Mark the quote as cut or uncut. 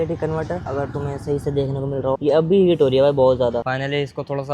cut